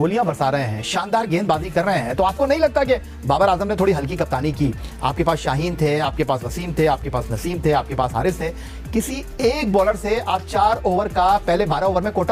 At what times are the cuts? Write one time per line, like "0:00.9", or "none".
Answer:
none